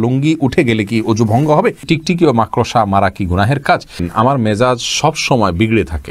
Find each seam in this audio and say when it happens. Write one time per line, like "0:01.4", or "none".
0:01.8
0:04.1

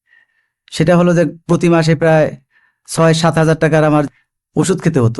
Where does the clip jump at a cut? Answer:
0:04.1

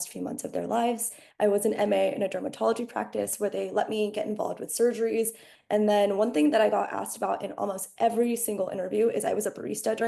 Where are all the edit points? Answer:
0:01.2
0:05.5

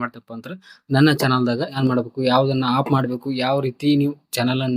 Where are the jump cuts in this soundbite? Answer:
0:01.8

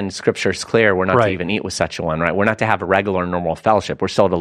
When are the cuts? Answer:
none

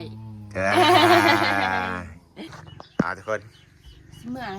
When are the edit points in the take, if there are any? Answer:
0:02.5

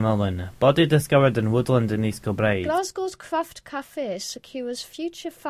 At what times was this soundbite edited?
0:02.6

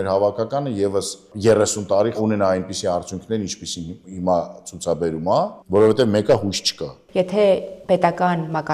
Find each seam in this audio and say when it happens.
0:01.3
0:02.2
0:05.6
0:07.0

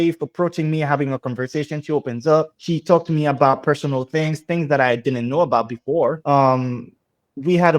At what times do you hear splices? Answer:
0:06.2

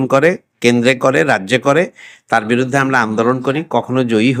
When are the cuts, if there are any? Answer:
none

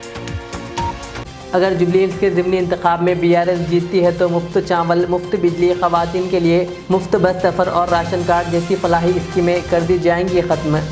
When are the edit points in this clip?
0:01.1

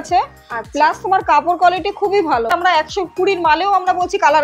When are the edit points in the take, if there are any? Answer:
0:02.5

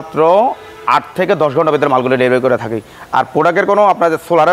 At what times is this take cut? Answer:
none

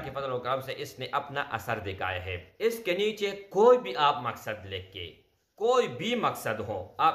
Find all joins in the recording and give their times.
0:02.5

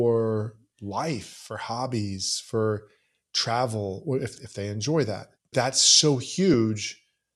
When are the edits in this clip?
0:05.5

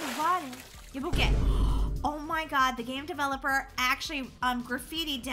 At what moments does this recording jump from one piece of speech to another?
0:01.1

